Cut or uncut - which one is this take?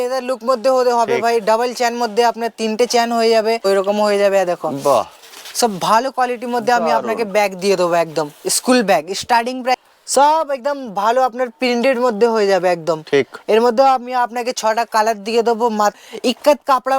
cut